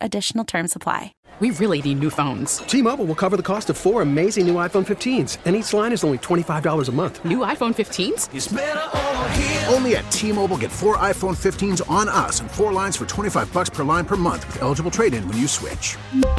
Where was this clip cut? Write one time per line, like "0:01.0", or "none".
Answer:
0:01.1

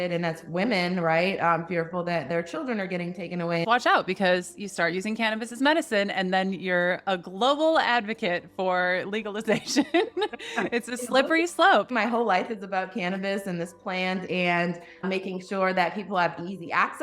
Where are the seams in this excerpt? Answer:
0:03.6
0:11.9
0:15.0

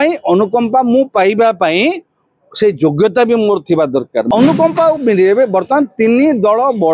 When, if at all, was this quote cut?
0:04.3

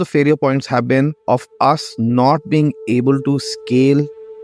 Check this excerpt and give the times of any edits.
0:01.2

